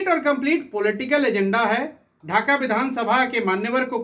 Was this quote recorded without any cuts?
no; 1 cut; at 2.2 s

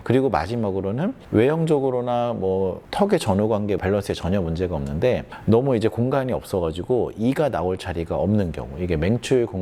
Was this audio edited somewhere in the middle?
no; 0 cuts

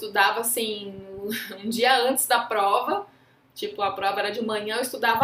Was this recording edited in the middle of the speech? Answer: no; 0 cuts

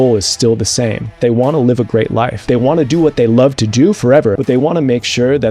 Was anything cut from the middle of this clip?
yes; 3 cuts; at 1.2 s, 2.4 s, 4.4 s

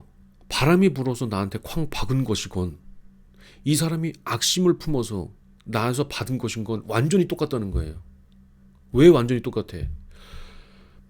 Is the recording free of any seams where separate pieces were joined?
yes; 0 cuts

